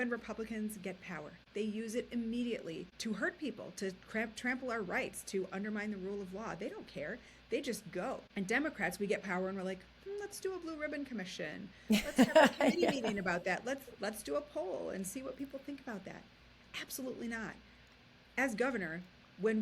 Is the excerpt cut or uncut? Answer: cut